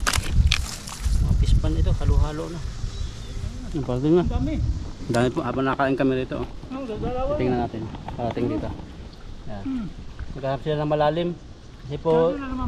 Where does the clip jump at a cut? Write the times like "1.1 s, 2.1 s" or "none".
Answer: 3.5 s